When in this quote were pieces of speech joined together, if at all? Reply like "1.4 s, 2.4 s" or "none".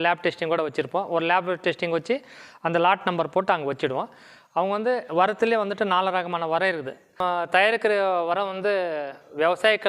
7.2 s

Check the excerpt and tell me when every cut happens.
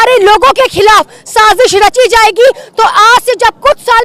none

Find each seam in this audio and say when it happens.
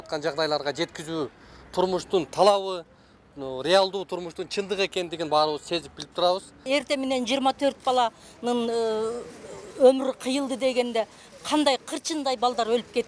6.6 s

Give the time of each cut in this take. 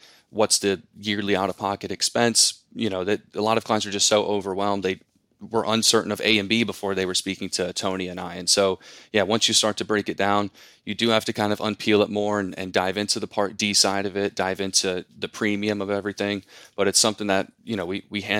none

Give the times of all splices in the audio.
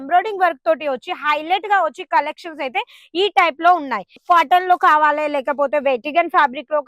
4.2 s

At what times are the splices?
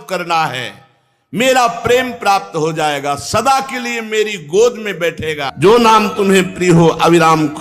5.5 s

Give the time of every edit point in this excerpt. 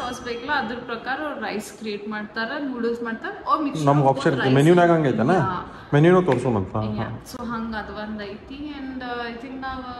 none

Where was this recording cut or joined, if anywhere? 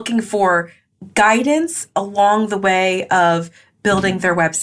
none

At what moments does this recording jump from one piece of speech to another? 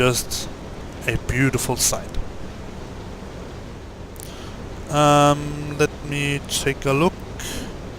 4.1 s

